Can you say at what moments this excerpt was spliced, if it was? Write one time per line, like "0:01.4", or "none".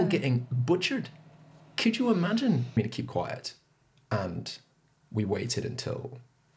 0:02.7